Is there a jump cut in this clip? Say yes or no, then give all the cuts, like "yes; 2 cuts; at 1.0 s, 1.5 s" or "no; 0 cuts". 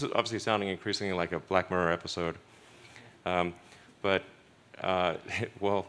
no; 0 cuts